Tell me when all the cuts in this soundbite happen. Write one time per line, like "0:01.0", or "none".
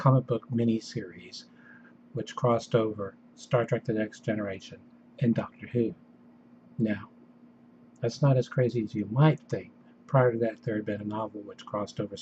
0:08.6

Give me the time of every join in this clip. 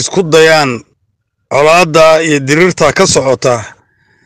none

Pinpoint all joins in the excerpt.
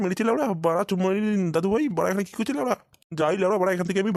none

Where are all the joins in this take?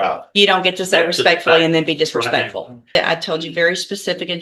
0:02.9

